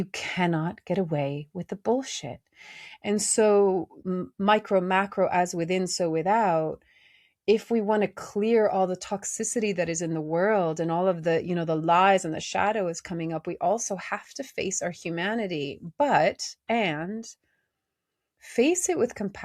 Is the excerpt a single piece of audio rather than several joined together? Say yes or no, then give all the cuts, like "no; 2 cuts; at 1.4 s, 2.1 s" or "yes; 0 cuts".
yes; 0 cuts